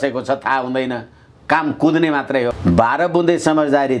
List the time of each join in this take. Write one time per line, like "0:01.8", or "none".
0:02.5